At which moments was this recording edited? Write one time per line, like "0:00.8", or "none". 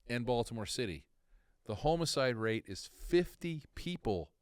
none